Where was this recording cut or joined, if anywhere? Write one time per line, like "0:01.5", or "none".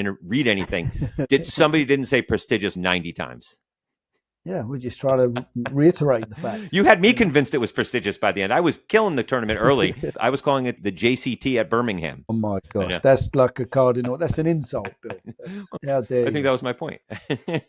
0:02.7
0:10.1
0:12.3